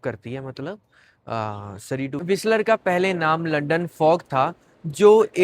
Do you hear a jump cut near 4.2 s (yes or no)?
no